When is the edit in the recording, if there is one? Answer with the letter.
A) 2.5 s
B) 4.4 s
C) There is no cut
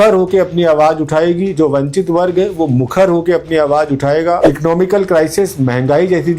B